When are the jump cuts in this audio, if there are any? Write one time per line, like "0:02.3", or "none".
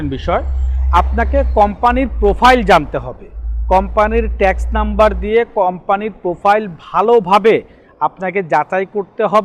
none